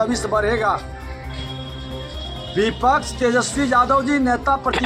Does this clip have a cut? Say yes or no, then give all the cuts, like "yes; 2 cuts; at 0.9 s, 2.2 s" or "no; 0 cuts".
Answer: yes; 2 cuts; at 1.1 s, 2.5 s